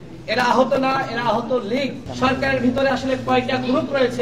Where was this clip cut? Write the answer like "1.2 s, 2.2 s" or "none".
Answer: 2.0 s